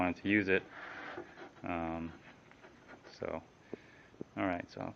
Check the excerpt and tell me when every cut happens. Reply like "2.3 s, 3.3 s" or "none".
2.3 s